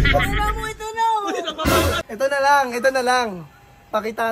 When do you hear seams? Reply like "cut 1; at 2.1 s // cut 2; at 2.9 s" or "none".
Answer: cut 1; at 2.0 s